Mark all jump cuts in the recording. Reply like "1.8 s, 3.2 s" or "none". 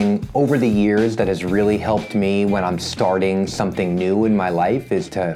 none